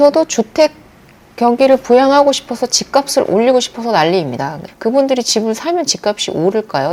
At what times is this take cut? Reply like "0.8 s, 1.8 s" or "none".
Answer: 4.7 s

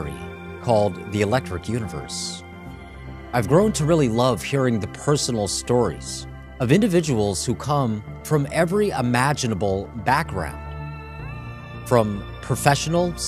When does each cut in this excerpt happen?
4.3 s

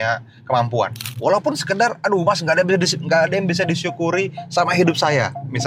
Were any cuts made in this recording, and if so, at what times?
1.1 s

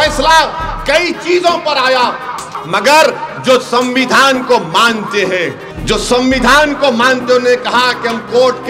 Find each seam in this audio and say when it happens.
2.5 s, 5.7 s

